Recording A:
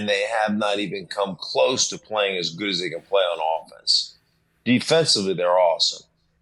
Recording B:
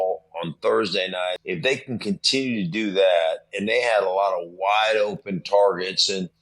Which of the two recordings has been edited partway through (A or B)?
B